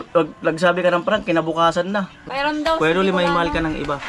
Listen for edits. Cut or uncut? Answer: cut